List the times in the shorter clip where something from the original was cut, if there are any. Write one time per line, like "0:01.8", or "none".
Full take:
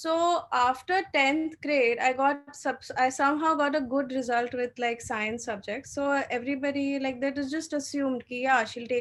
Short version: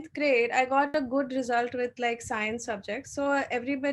0:00.9